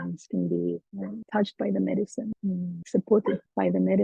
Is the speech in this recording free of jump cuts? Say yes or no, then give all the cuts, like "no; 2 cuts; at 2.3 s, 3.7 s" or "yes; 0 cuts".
yes; 0 cuts